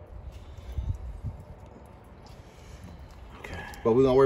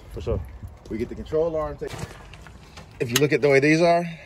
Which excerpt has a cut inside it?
second; 1 cut; at 1.8 s

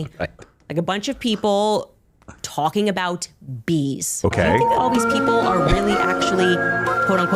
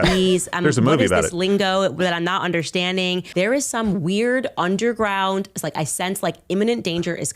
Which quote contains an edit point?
second; 1 cut; at 3.3 s

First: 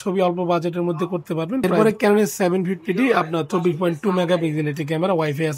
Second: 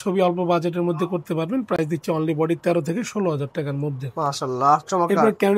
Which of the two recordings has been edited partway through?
first; 1 cut; at 1.8 s

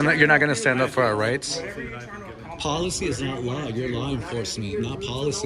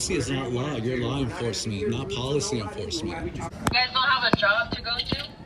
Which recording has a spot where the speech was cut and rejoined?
second; 1 cut; at 3.5 s

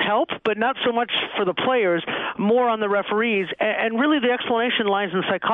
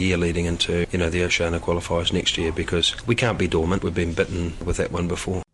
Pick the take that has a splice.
second; 4 cuts; at 0.9 s, 2.9 s, 3.8 s, 4.6 s

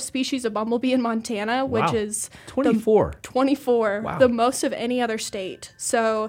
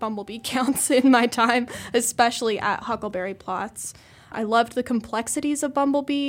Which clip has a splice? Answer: second; 1 cut; at 4.3 s

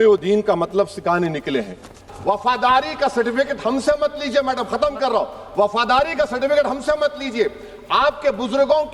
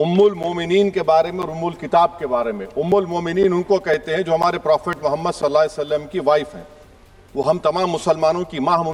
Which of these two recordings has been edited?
first; 1 cut; at 2.0 s

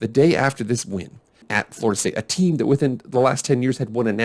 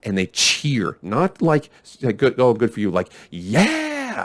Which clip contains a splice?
first; 1 cut; at 1.5 s

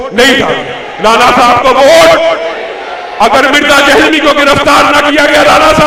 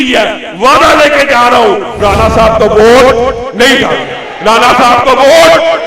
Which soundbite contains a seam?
second; 1 cut; at 2.0 s

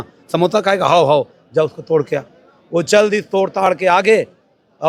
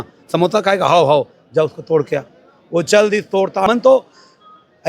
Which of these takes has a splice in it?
second; 1 cut; at 3.7 s

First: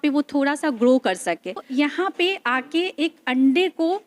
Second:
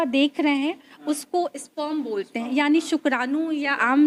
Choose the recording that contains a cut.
first; 1 cut; at 1.6 s

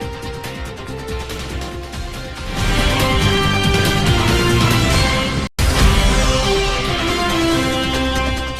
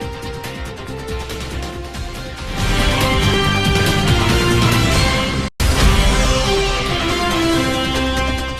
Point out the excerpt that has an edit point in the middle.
first; 2 cuts; at 1.3 s, 3.4 s

